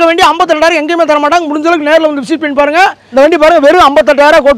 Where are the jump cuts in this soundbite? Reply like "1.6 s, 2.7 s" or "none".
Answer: 3.0 s